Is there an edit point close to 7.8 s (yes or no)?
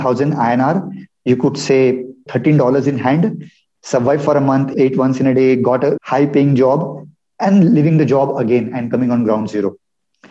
no